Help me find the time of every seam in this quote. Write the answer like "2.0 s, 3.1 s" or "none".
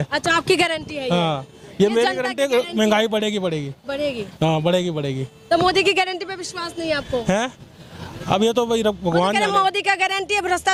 none